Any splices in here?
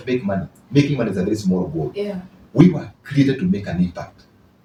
no; 0 cuts

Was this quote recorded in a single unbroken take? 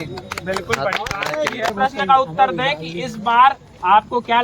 no; 1 cut; at 1.7 s

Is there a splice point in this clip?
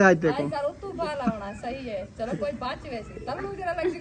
no; 0 cuts

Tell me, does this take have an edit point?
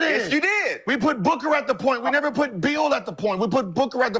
no; 0 cuts

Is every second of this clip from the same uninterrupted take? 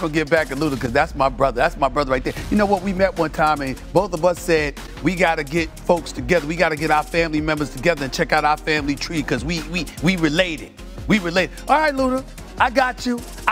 yes; 0 cuts

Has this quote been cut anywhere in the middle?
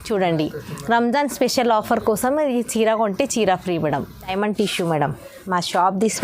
yes; 1 cut; at 4.3 s

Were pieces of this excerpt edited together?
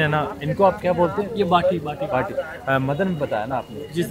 no; 0 cuts

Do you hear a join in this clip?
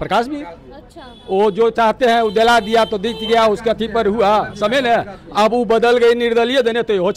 no; 0 cuts

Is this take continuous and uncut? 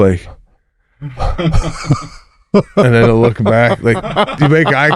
yes; 0 cuts

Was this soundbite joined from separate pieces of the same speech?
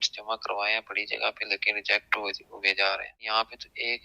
yes; 1 cut; at 3.1 s

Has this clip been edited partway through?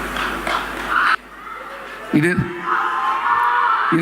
yes; 1 cut; at 1.1 s

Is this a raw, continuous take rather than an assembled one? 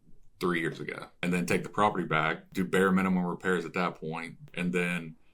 no; 3 cuts; at 1.0 s, 2.4 s, 4.4 s

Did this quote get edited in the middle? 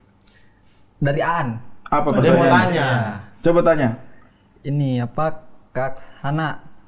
no; 0 cuts

